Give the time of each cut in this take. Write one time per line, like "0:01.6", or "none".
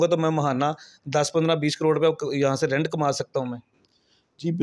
none